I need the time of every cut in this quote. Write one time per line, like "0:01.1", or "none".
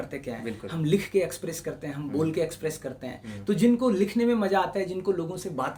none